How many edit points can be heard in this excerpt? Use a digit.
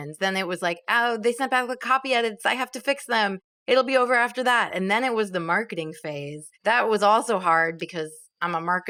0